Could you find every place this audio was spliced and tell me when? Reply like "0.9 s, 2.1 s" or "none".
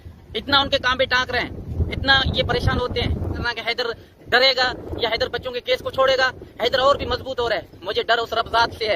3.5 s